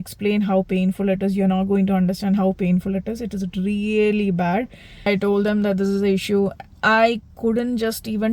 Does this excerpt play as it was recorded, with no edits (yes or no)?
no